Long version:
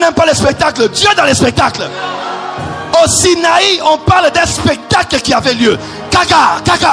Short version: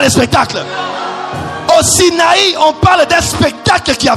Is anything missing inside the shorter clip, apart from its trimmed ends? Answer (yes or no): no